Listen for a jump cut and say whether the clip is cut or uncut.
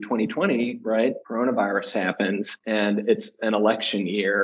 cut